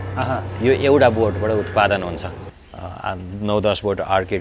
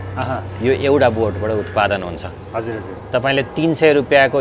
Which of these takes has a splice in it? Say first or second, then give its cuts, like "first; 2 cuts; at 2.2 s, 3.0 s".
first; 1 cut; at 2.3 s